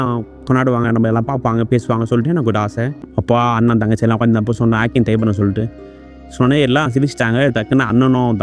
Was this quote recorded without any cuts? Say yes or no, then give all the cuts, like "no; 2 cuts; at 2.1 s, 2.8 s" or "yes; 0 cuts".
no; 1 cut; at 3.0 s